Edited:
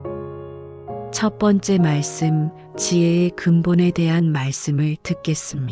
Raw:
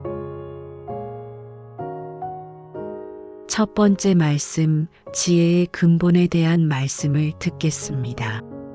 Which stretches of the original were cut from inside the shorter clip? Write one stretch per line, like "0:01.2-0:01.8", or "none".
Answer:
0:01.1-0:03.5

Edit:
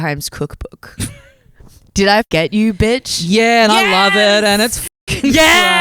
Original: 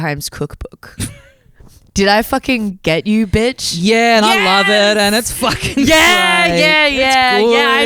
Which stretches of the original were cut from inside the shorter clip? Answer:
0:02.3-0:02.8

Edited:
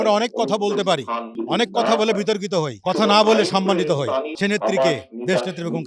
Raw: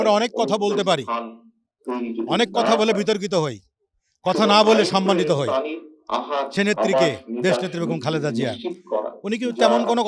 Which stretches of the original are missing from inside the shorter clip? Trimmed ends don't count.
0:01.4-0:02.2
0:03.5-0:04.2
0:05.7-0:06.5

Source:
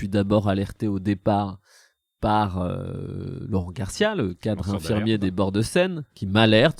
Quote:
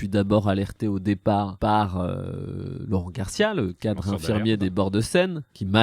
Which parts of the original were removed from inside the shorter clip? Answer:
0:01.5-0:02.1

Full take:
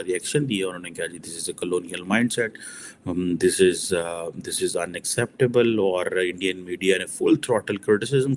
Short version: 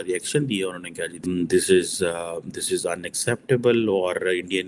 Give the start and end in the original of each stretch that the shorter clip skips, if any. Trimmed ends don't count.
0:01.2-0:03.1

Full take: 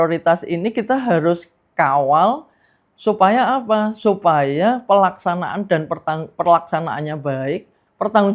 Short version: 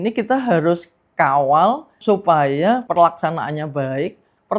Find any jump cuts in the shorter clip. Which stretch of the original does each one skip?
0:02.5-0:03.9
0:04.8-0:06.3

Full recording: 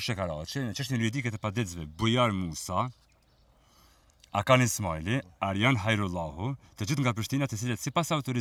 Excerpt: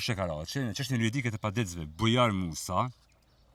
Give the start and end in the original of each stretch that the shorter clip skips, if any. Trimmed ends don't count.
none

